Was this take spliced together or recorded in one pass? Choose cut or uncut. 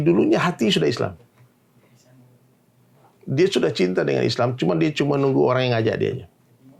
uncut